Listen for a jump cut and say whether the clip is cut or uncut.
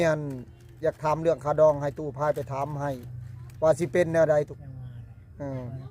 cut